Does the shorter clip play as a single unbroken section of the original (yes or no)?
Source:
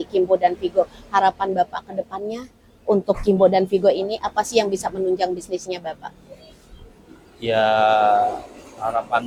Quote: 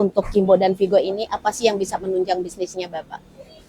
yes